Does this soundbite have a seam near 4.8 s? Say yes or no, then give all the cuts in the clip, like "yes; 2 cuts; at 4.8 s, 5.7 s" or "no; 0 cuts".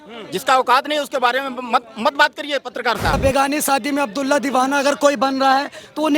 no; 1 cut; at 3.2 s